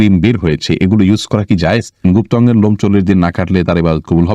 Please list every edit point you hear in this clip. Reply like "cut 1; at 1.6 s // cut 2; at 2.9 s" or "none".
cut 1; at 2.0 s